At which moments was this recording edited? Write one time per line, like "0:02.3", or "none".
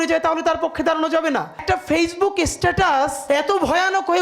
0:01.6
0:03.2